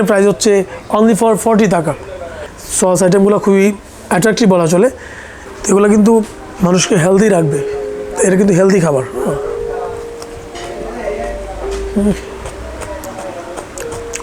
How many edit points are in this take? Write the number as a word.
two